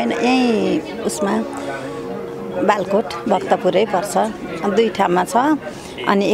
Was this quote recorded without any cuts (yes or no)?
yes